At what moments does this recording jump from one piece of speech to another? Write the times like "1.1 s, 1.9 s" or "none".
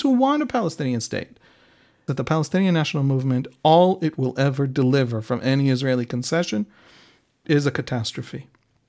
2.1 s, 7.4 s